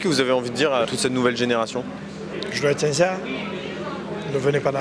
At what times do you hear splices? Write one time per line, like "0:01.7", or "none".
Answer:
0:00.9
0:02.2